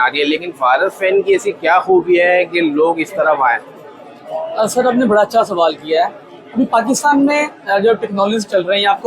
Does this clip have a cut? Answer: no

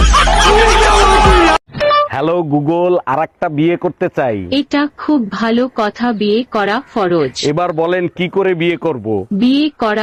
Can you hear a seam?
no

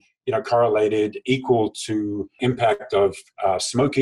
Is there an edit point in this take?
yes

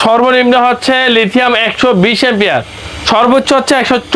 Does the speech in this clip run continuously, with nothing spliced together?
yes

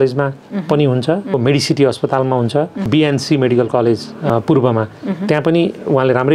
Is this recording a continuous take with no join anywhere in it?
no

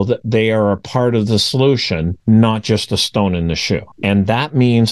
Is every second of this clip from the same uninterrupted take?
no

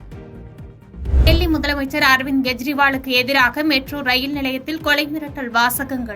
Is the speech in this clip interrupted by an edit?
yes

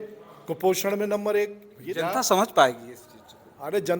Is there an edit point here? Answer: yes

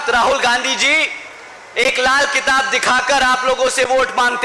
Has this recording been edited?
no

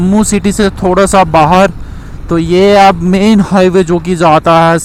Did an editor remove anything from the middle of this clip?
no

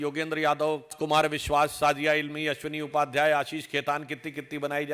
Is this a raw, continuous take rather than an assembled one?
no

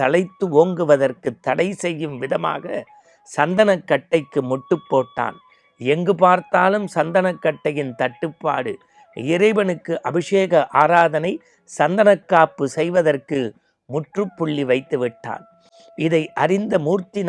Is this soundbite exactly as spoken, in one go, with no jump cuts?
yes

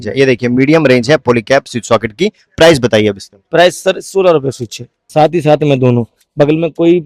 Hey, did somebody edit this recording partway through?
yes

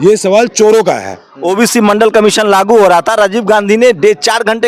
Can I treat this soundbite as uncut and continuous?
no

